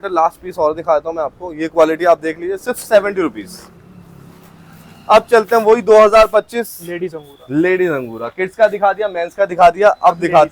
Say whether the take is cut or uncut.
uncut